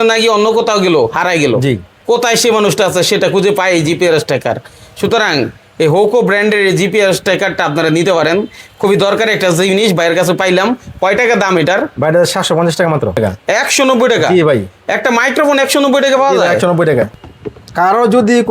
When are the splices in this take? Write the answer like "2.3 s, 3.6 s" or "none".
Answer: 1.9 s, 13.2 s, 17.1 s